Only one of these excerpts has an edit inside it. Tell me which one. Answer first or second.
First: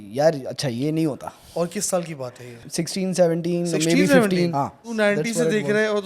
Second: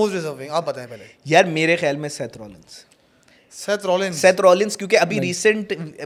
first